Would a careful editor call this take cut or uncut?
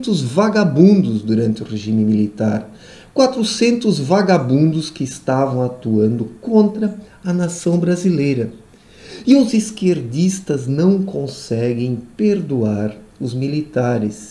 cut